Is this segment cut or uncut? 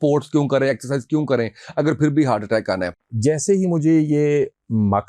cut